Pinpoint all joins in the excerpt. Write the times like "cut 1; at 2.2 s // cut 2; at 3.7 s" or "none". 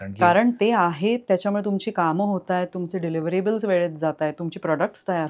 none